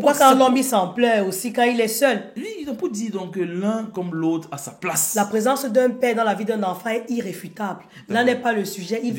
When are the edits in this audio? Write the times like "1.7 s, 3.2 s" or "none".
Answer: none